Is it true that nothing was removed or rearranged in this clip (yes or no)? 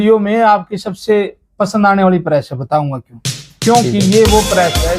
yes